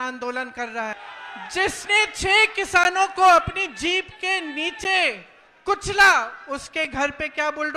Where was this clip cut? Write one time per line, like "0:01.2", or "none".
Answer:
0:01.0